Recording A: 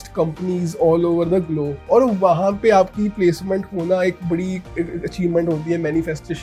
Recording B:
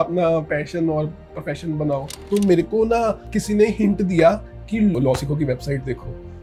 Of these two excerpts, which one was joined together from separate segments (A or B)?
B